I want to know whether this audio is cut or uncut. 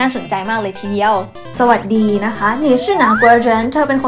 cut